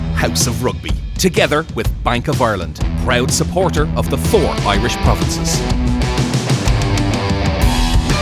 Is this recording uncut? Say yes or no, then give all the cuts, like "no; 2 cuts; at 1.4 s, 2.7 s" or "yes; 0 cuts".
yes; 0 cuts